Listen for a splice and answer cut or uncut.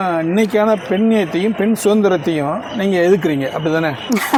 uncut